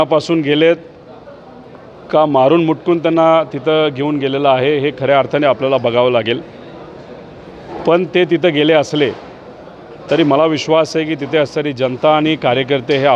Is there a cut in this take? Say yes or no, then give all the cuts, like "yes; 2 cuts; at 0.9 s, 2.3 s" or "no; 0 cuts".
no; 0 cuts